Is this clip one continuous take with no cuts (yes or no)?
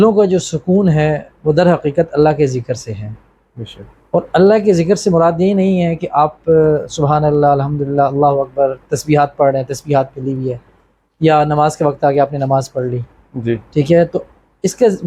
yes